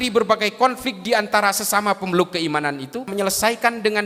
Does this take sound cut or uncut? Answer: cut